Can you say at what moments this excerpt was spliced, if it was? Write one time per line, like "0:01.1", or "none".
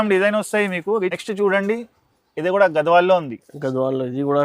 0:01.2